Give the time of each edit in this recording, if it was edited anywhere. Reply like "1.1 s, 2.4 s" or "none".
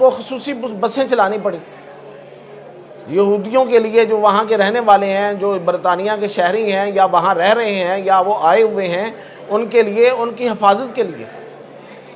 none